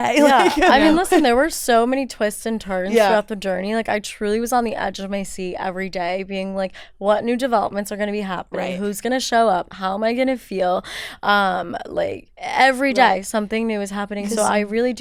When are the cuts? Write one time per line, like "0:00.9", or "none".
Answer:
none